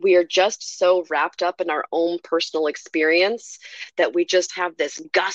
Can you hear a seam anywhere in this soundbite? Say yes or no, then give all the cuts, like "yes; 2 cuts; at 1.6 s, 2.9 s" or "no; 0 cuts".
no; 0 cuts